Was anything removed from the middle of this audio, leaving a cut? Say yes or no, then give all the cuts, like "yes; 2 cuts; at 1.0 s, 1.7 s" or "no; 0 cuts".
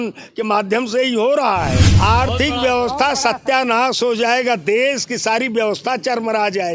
yes; 1 cut; at 1.9 s